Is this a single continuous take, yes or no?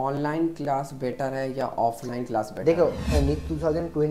no